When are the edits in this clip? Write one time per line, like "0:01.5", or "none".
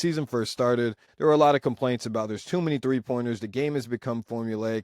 0:01.0